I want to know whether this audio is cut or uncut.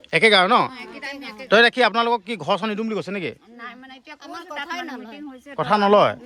uncut